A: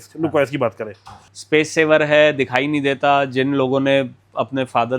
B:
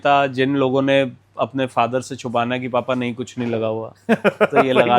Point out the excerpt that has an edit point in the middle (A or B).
A